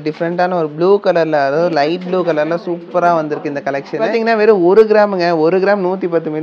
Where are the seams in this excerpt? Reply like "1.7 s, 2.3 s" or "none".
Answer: 4.1 s